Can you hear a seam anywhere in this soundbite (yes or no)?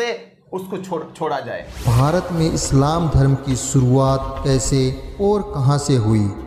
yes